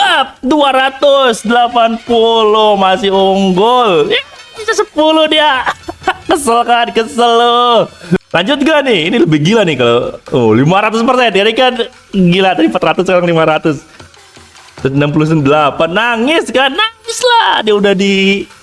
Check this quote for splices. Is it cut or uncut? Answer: cut